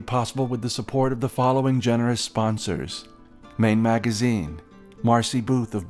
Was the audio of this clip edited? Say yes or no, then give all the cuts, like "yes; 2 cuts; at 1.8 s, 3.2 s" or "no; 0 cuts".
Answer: no; 0 cuts